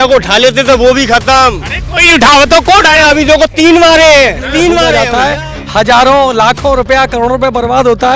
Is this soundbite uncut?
no; 1 cut; at 5.0 s

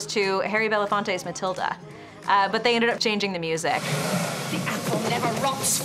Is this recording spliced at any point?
yes; 2 cuts; at 2.1 s, 4.1 s

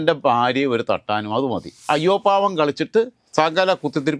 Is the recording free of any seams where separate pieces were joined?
no; 1 cut; at 1.9 s

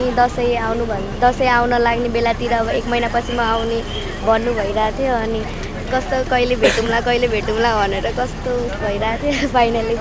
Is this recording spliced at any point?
no; 0 cuts

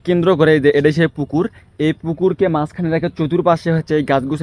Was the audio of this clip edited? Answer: no; 0 cuts

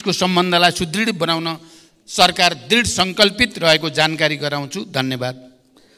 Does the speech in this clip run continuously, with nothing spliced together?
yes; 0 cuts

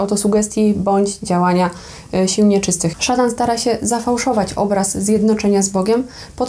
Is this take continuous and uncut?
no; 1 cut; at 3.0 s

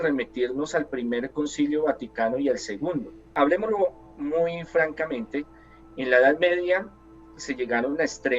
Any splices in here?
yes; 1 cut; at 3.2 s

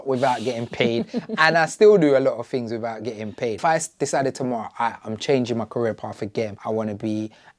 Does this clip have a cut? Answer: yes; 2 cuts; at 3.6 s, 6.6 s

